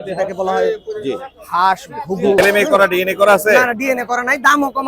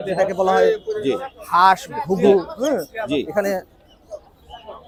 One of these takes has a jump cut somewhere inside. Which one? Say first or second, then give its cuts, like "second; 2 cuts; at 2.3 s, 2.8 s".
first; 1 cut; at 2.4 s